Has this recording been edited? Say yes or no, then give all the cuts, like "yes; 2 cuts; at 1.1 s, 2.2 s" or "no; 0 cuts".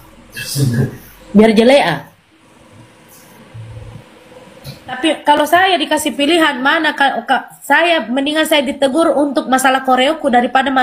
yes; 1 cut; at 5.0 s